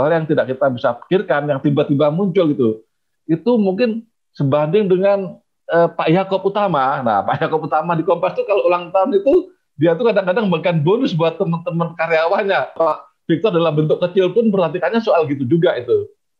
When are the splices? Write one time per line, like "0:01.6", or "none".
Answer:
0:12.7